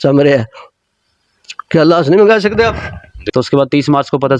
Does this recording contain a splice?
yes; 1 cut; at 3.2 s

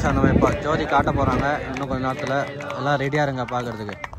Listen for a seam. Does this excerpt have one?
no; 0 cuts

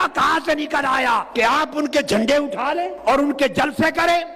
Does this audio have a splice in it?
yes; 2 cuts; at 1.3 s, 3.0 s

